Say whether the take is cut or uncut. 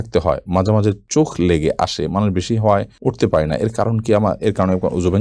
uncut